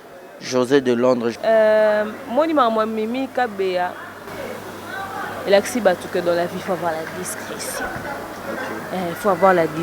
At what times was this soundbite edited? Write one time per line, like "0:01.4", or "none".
0:01.4